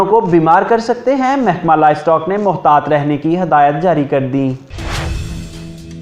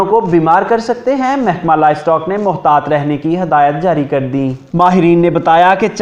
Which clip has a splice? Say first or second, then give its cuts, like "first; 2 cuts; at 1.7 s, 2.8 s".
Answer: first; 1 cut; at 4.6 s